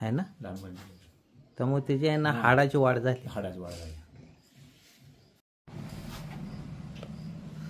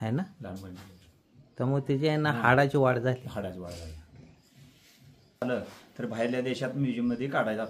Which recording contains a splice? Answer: second; 1 cut; at 5.4 s

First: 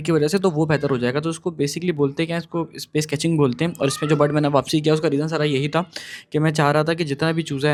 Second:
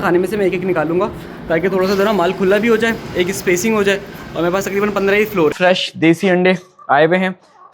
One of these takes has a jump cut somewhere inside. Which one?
second; 1 cut; at 5.6 s

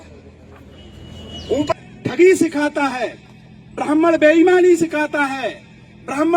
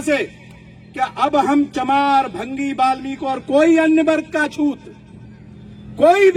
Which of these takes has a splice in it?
first; 1 cut; at 1.7 s

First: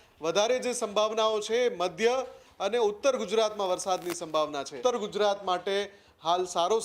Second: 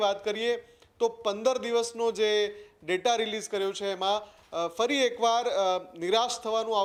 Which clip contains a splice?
first; 1 cut; at 4.7 s

